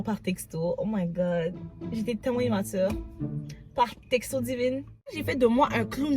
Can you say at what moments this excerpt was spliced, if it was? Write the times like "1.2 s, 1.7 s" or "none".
5.2 s